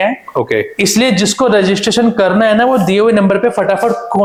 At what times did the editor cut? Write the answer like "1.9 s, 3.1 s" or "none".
none